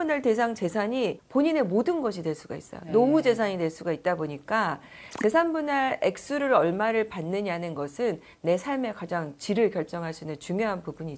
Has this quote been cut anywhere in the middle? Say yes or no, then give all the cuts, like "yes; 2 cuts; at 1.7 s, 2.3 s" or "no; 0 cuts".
no; 0 cuts